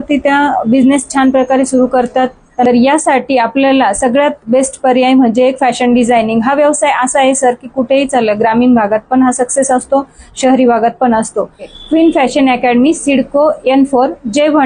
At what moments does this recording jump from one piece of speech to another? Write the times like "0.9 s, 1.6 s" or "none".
2.6 s, 11.7 s